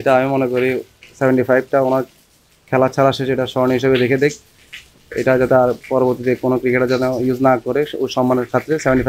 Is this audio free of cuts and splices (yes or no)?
yes